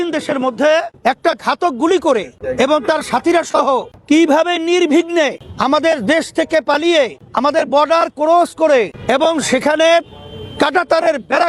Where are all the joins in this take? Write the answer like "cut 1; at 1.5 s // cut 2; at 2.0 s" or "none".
cut 1; at 0.9 s // cut 2; at 2.4 s // cut 3; at 3.9 s // cut 4; at 5.5 s // cut 5; at 7.2 s // cut 6; at 9.0 s